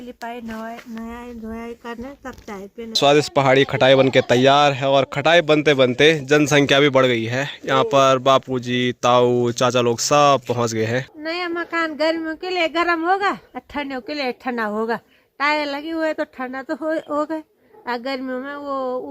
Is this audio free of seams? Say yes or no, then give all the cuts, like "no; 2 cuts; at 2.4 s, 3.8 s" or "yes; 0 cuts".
no; 2 cuts; at 3.0 s, 11.1 s